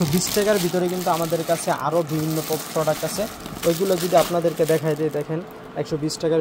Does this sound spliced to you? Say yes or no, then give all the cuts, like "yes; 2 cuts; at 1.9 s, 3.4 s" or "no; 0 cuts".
no; 0 cuts